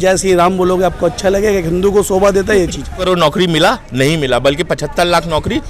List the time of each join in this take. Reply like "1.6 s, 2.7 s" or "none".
3.0 s